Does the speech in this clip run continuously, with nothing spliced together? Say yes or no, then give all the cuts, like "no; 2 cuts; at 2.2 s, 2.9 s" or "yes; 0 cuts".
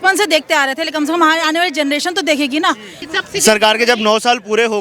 no; 1 cut; at 3.1 s